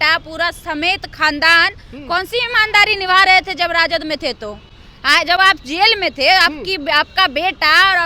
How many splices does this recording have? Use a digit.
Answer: 0